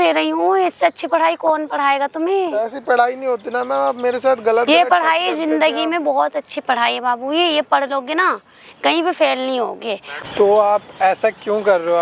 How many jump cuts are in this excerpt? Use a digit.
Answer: 0